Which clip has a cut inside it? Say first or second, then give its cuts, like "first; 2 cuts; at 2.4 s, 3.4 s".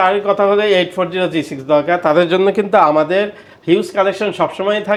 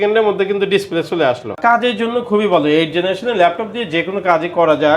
second; 1 cut; at 1.6 s